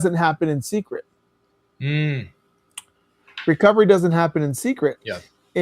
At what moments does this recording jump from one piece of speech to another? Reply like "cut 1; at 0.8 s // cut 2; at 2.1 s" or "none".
none